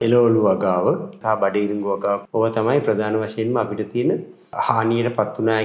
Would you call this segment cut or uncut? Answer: cut